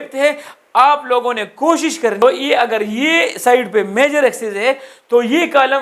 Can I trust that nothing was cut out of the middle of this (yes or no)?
no